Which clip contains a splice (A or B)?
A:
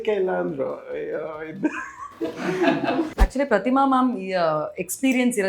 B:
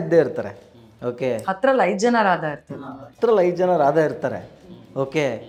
A